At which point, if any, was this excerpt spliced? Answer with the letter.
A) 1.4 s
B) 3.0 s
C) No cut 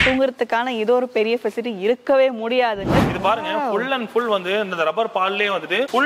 B